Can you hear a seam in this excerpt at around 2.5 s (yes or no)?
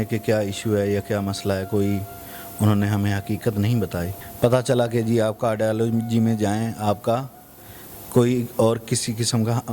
no